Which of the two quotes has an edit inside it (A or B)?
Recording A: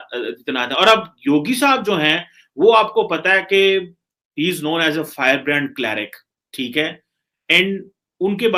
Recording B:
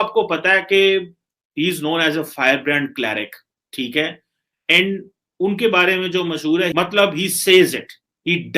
B